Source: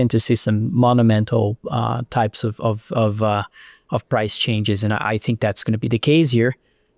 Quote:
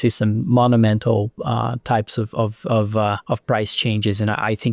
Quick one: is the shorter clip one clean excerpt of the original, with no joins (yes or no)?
no